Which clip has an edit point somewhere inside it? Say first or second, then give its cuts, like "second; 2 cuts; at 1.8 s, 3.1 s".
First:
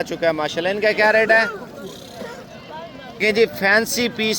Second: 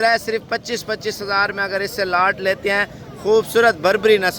first; 1 cut; at 3.2 s